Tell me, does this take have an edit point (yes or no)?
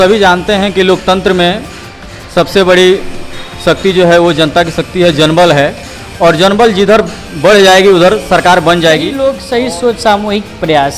yes